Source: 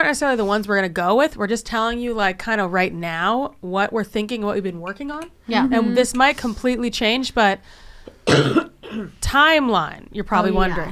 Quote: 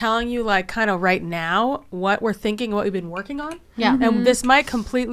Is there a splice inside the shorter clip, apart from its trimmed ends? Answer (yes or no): no